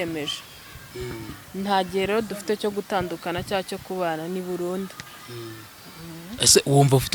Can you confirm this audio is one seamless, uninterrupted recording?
yes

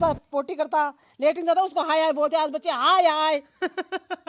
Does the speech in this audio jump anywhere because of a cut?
no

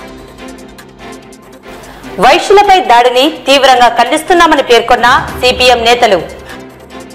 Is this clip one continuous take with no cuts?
yes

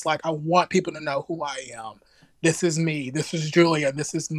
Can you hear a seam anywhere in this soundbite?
no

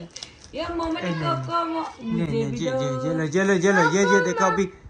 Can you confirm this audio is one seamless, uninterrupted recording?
yes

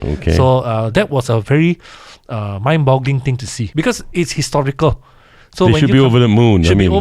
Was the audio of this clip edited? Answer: yes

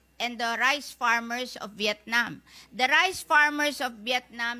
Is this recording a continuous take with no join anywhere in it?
yes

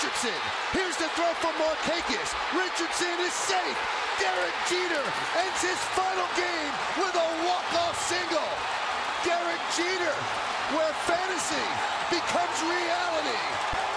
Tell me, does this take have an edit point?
no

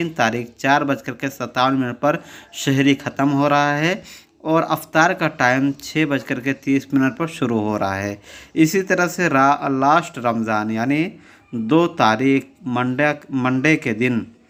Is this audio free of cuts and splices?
yes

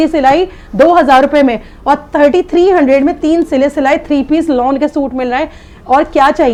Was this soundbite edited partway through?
no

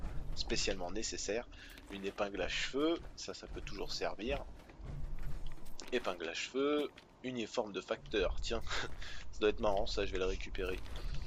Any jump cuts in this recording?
no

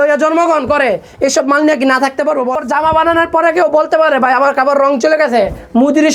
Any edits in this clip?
yes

